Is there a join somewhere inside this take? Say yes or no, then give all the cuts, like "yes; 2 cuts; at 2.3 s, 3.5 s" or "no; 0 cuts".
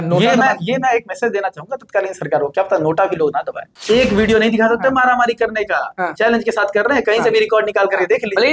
yes; 1 cut; at 3.6 s